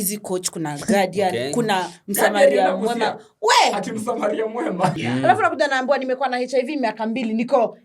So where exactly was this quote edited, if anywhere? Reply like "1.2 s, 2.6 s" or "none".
5.0 s